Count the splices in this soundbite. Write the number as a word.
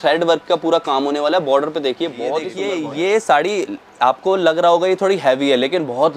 one